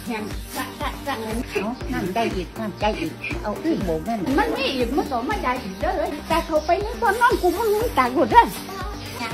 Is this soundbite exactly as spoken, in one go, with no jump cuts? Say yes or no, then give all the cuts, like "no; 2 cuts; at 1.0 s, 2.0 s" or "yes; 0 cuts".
yes; 0 cuts